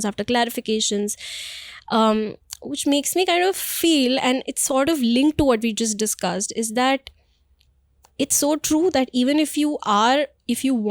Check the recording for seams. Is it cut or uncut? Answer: uncut